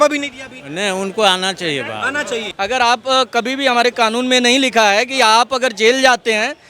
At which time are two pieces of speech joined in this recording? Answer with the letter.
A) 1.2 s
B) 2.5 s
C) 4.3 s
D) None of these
B